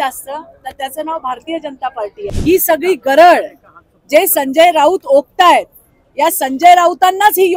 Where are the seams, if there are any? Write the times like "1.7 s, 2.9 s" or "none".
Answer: 2.2 s

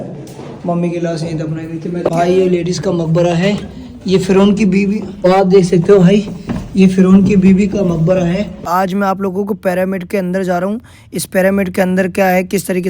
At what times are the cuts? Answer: 2.1 s, 5.2 s, 8.7 s

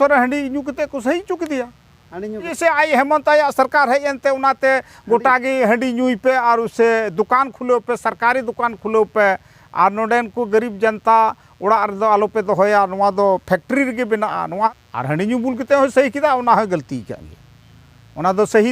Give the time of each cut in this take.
2.5 s, 14.7 s

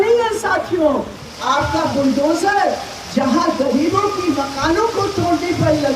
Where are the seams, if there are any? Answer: 1.3 s

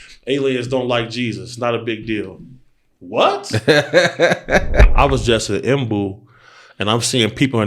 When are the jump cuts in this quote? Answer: 4.9 s

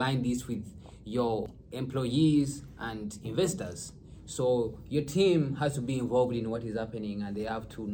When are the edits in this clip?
1.6 s

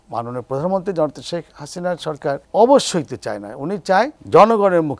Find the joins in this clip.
2.4 s, 4.2 s

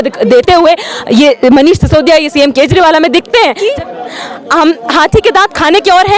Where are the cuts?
3.6 s

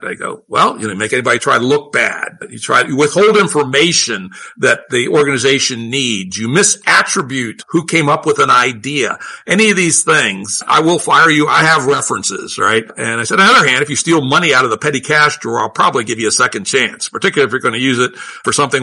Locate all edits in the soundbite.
1.1 s

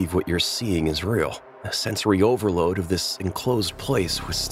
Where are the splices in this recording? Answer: none

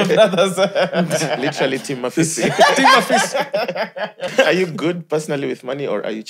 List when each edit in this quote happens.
4.3 s

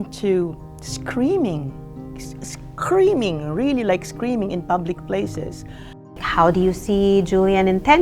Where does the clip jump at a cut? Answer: 6.2 s

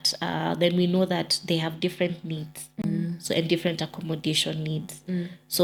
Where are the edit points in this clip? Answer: none

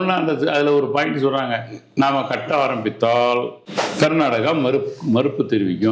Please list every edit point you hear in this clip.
3.6 s

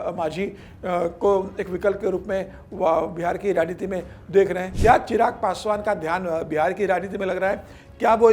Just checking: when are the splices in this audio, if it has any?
4.7 s

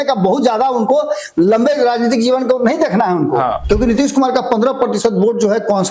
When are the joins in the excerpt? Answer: 3.6 s

